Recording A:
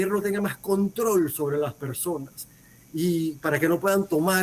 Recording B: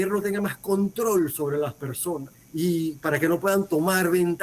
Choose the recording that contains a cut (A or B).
B